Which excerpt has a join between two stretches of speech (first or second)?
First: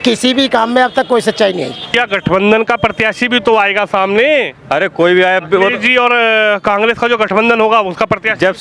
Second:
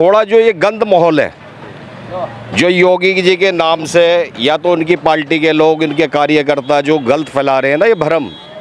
first